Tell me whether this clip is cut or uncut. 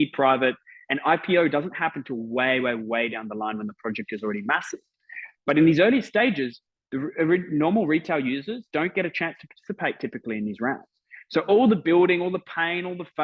uncut